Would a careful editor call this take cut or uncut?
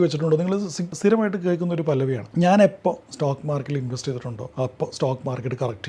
cut